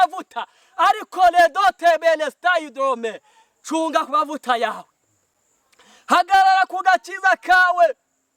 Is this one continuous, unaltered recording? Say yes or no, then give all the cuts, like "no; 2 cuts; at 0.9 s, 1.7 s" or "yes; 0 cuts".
yes; 0 cuts